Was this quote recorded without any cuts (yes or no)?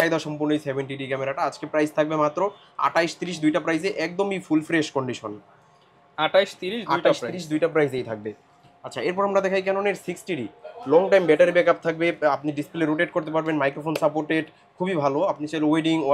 yes